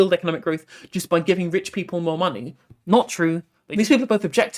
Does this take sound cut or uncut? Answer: cut